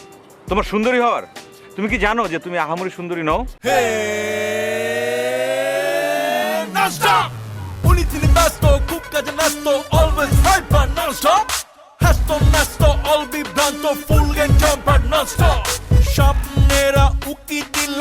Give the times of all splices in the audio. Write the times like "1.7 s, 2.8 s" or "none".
3.6 s